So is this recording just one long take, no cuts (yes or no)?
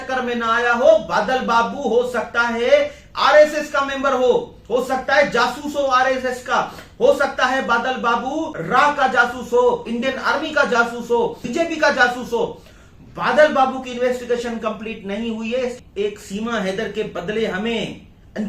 no